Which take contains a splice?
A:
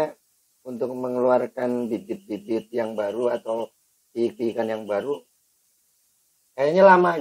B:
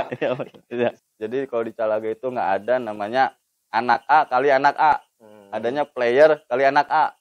B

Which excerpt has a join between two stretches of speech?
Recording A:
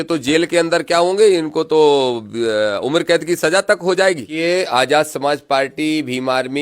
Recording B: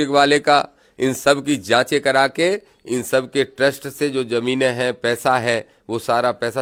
A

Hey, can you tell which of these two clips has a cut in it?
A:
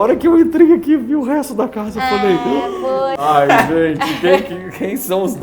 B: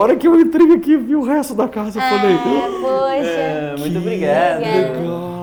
A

